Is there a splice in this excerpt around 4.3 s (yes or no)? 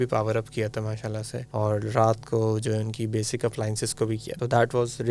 yes